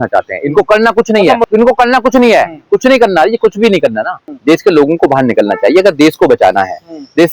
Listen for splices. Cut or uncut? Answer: cut